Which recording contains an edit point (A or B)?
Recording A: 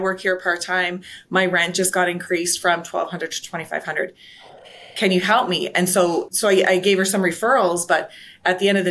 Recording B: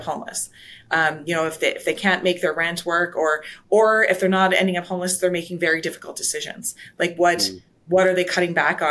A